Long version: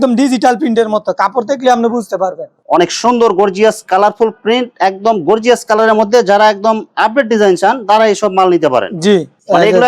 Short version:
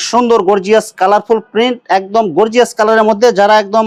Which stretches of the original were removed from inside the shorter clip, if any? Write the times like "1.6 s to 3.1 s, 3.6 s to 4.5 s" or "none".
none